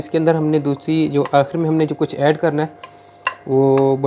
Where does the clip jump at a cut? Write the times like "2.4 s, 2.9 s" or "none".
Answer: none